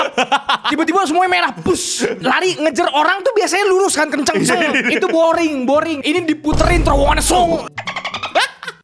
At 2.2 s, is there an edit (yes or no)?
yes